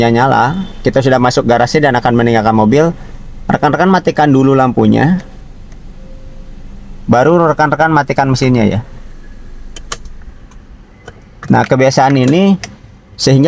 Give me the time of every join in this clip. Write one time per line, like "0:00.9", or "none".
none